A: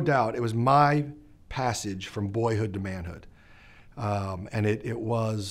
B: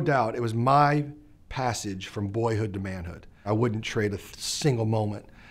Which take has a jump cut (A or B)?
B